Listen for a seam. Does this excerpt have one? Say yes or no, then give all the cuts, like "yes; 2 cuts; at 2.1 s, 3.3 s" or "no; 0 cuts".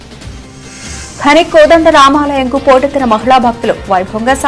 yes; 1 cut; at 0.9 s